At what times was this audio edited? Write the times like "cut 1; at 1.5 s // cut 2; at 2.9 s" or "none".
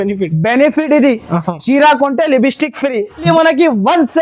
cut 1; at 3.2 s